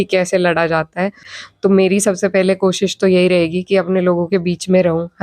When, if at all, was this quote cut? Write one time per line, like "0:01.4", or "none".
0:01.3